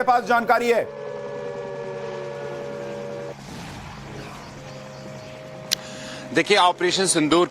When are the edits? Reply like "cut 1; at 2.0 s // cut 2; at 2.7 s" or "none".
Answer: cut 1; at 2.6 s